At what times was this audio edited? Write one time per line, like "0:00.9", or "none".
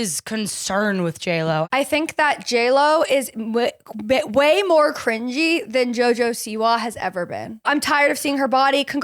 0:01.7
0:07.7

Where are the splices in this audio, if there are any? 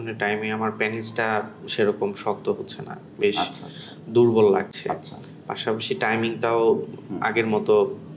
none

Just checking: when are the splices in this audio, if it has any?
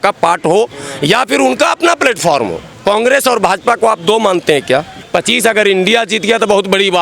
0:02.7
0:05.0

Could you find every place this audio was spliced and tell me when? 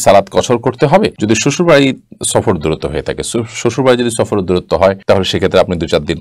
none

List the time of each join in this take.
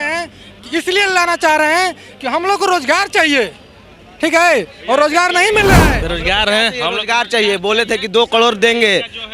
0:06.0

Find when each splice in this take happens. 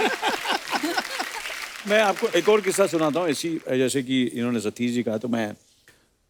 none

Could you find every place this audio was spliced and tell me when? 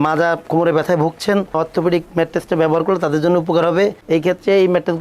none

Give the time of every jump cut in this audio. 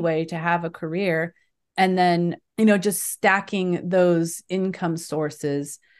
0:02.4

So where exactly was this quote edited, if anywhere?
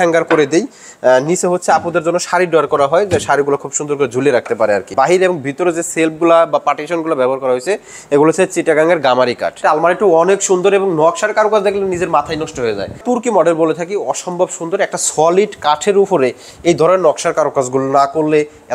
0:04.9
0:09.6
0:13.0

